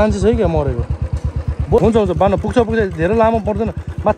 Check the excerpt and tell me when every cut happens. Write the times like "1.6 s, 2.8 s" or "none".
1.8 s

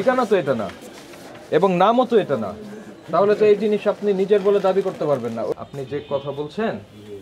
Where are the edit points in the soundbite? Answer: 5.5 s

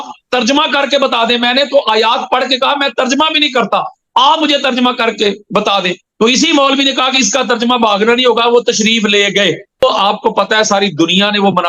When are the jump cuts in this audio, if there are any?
9.8 s

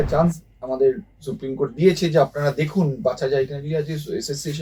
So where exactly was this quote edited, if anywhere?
none

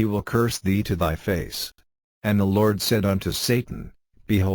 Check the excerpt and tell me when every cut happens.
1.7 s, 3.1 s

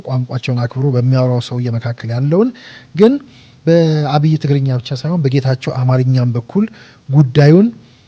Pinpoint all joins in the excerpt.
none

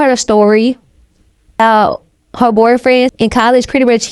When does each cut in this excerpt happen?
1.6 s, 3.1 s

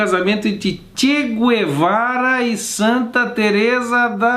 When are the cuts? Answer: none

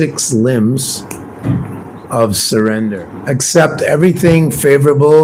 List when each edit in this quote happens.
none

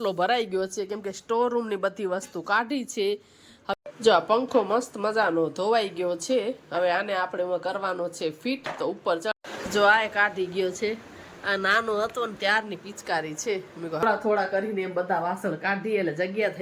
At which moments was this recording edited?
3.7 s, 9.3 s, 14.0 s

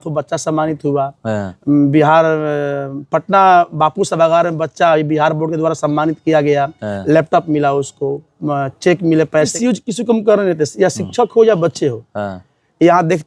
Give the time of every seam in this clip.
9.5 s

